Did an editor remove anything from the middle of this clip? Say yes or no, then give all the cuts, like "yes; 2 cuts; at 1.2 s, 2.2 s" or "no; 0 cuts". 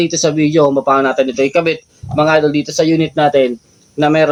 no; 0 cuts